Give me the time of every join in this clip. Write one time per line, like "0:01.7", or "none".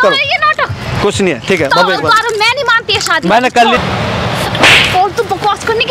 0:03.8